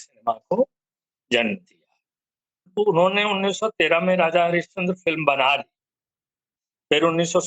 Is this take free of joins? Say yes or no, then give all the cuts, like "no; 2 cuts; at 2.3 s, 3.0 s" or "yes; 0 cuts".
no; 1 cut; at 2.7 s